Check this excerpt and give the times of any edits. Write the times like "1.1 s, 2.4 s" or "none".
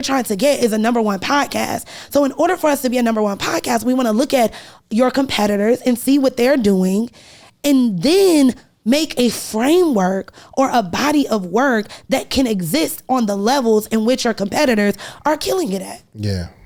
none